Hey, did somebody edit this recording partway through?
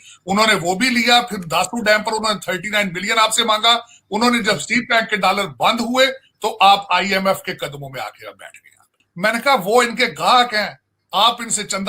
yes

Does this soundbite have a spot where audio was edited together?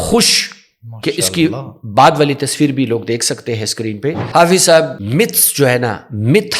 yes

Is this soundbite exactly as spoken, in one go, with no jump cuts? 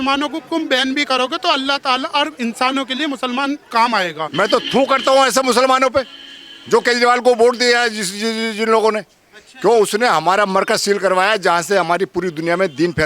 no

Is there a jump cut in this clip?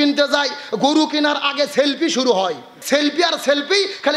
yes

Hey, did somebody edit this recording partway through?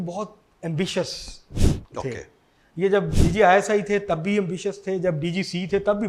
no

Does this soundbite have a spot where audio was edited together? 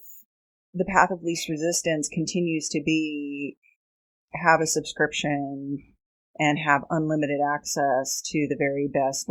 no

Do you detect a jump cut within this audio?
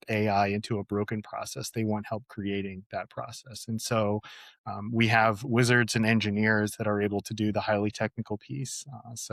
no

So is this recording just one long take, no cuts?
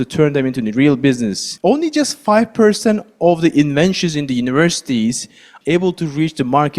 no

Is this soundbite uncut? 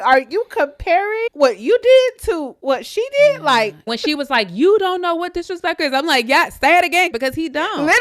no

